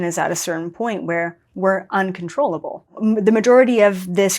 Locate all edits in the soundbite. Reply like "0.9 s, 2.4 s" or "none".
2.9 s